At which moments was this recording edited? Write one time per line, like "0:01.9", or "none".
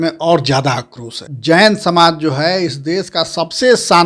0:01.3